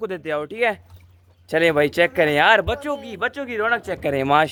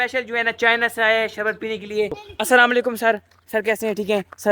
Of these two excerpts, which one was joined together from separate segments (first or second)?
second